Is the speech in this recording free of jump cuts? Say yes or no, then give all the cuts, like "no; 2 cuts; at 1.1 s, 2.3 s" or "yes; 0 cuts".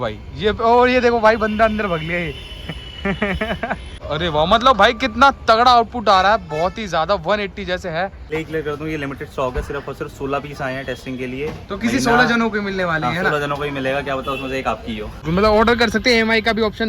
no; 3 cuts; at 3.9 s, 8.3 s, 15.2 s